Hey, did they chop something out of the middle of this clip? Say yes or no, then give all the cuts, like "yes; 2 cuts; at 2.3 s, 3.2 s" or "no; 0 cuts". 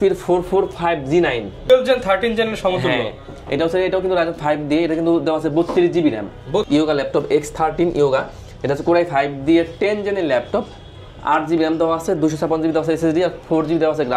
yes; 2 cuts; at 1.7 s, 6.7 s